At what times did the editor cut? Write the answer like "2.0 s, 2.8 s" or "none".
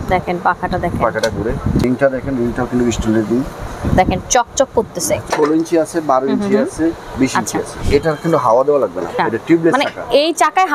1.8 s, 3.7 s, 5.3 s, 7.8 s, 9.1 s